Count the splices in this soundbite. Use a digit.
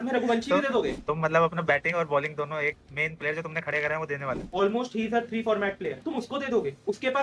3